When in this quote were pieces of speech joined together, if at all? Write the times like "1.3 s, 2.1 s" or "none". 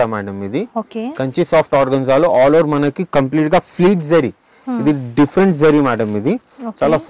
none